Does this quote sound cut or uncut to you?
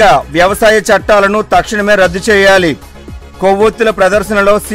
uncut